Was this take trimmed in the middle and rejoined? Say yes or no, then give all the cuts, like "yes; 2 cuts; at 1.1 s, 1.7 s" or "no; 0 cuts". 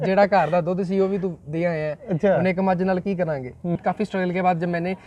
yes; 1 cut; at 3.8 s